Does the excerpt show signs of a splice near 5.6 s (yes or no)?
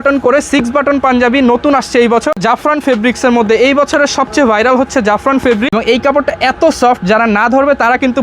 yes